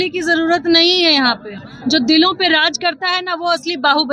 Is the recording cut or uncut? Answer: uncut